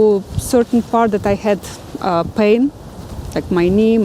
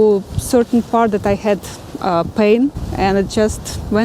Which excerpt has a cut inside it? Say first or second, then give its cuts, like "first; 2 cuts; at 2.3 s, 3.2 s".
second; 1 cut; at 2.8 s